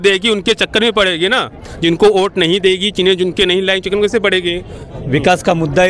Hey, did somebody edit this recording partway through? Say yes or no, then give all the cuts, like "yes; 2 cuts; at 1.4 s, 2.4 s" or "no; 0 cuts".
yes; 1 cut; at 4.9 s